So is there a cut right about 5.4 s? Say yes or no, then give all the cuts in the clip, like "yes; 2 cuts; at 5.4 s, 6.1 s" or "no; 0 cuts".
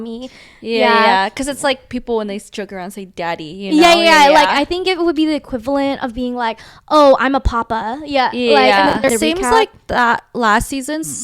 no; 1 cut; at 9.1 s